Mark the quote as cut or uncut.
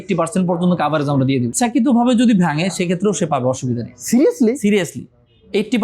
cut